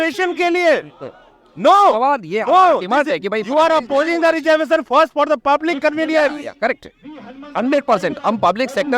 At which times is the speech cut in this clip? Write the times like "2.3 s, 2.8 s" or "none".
none

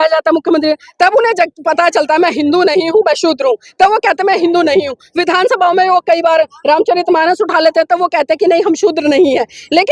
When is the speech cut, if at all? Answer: none

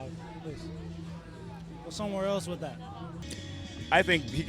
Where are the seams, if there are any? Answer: 3.3 s

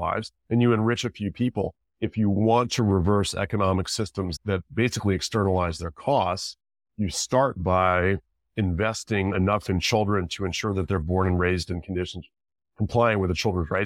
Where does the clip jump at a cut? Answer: 1.8 s, 4.3 s

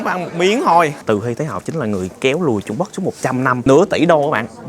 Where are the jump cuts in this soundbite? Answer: 1.0 s, 3.6 s

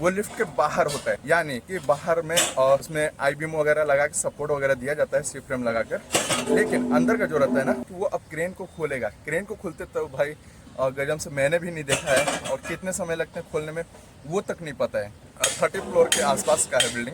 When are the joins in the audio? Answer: 1.2 s, 2.9 s, 7.9 s, 15.2 s

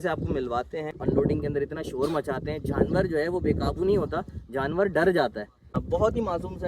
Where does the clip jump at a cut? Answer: 1.0 s, 5.8 s

